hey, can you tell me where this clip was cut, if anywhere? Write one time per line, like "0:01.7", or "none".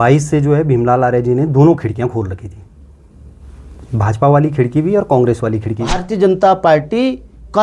0:06.0

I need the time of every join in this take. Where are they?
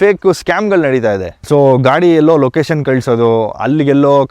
0:01.3

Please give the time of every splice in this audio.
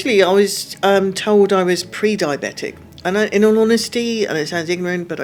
none

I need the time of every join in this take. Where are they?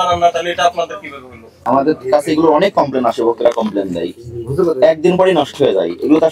0:01.5

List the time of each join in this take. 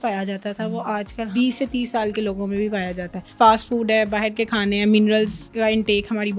0:01.3
0:03.2
0:05.4

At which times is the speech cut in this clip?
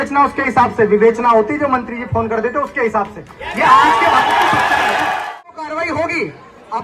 0:05.3

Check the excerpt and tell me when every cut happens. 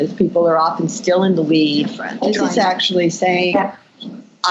0:02.0

